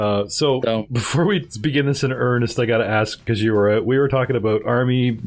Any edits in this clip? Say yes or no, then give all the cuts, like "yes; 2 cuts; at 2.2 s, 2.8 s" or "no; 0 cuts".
yes; 1 cut; at 3.3 s